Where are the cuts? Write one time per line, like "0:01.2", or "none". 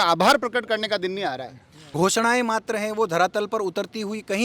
0:01.8